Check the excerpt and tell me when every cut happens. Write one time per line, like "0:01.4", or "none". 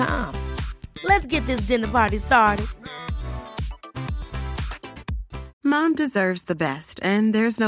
0:05.5